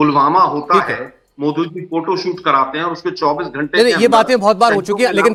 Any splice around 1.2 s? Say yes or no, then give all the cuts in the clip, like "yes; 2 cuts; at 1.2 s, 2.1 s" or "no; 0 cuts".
no; 0 cuts